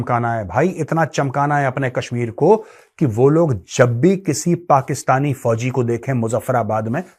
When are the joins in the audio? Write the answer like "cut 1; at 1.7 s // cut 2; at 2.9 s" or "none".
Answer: none